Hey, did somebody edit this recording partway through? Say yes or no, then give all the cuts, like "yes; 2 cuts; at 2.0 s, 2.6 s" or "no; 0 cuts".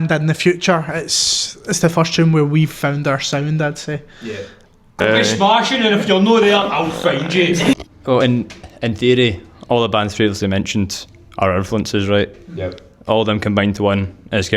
yes; 2 cuts; at 5.0 s, 7.7 s